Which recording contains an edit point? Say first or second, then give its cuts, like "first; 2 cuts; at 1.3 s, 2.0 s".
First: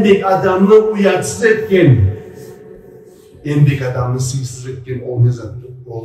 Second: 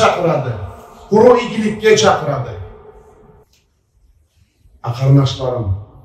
second; 1 cut; at 3.4 s